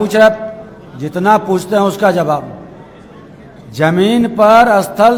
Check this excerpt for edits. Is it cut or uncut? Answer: uncut